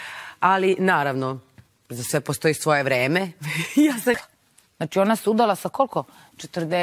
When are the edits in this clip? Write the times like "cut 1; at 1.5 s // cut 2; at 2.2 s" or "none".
none